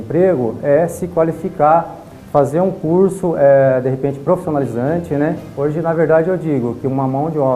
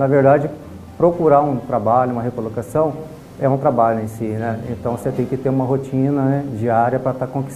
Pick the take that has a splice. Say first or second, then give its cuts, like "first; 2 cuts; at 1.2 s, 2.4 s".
first; 1 cut; at 5.5 s